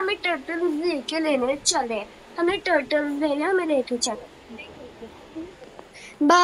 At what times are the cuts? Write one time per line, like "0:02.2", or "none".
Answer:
none